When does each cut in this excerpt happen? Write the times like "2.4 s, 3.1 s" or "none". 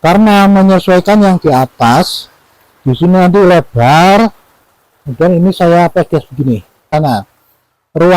6.9 s